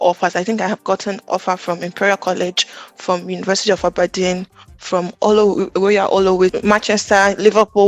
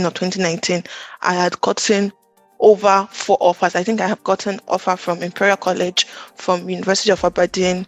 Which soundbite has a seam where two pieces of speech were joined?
first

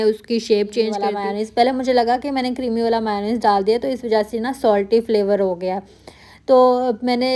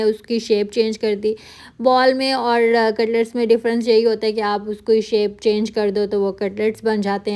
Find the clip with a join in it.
first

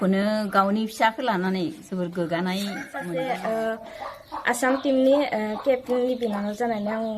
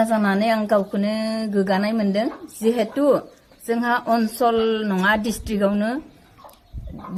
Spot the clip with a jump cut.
first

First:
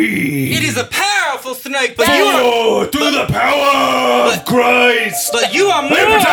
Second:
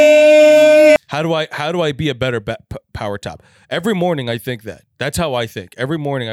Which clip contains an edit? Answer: second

